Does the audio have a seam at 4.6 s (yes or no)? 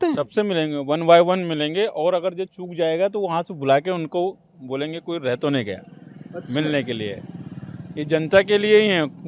no